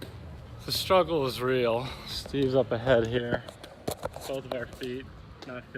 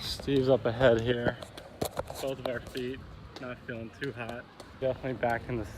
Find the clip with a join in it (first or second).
second